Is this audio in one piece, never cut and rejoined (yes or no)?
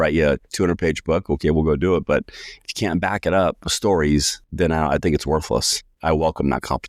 no